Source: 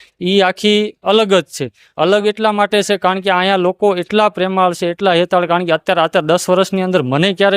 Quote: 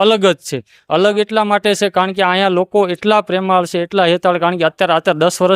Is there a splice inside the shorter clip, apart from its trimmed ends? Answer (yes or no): no